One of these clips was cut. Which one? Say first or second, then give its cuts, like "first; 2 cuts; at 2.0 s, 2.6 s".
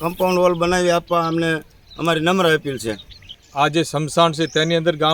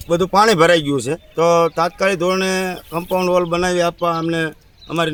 first; 1 cut; at 3.2 s